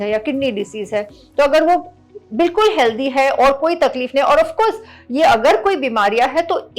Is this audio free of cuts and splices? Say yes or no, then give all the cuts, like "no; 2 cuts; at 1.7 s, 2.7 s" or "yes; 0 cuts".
yes; 0 cuts